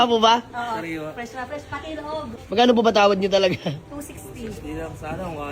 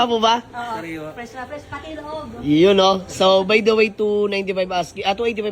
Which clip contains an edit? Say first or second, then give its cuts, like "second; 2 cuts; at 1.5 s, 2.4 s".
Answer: first; 1 cut; at 2.3 s